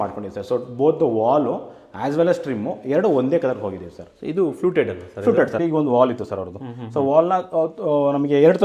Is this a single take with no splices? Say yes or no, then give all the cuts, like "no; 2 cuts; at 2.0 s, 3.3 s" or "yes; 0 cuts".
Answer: no; 1 cut; at 5.6 s